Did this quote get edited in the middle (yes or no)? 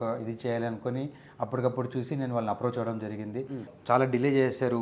yes